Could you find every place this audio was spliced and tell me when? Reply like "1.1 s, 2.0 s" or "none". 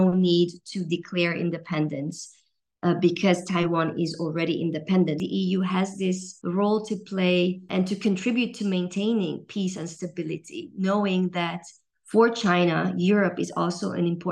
5.2 s, 6.3 s, 7.7 s